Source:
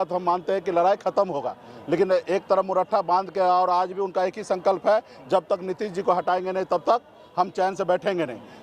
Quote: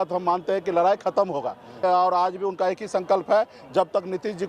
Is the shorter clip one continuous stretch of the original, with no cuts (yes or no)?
no